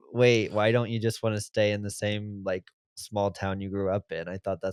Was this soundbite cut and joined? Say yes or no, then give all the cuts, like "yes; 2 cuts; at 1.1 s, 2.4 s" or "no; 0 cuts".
no; 0 cuts